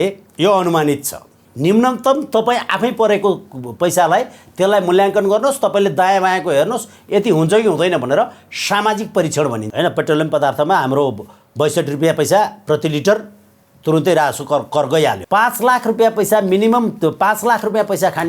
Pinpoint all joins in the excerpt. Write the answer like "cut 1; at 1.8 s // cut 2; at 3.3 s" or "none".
cut 1; at 1.4 s // cut 2; at 9.6 s // cut 3; at 15.2 s

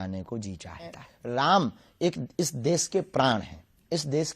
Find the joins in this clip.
cut 1; at 1.1 s

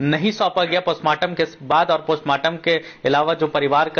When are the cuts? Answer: none

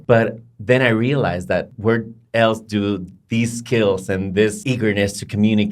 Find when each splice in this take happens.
cut 1; at 1.7 s // cut 2; at 4.6 s

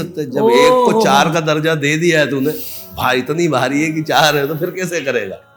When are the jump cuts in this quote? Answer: none

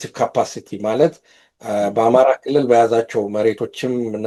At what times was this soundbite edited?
none

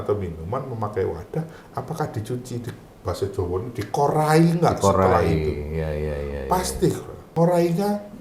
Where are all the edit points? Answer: cut 1; at 7.2 s

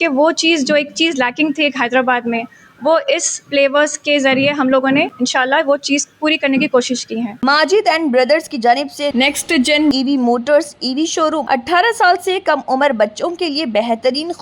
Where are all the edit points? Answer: cut 1; at 7.4 s // cut 2; at 11.4 s

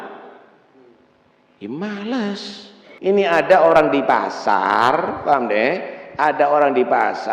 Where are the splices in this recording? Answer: cut 1; at 2.8 s

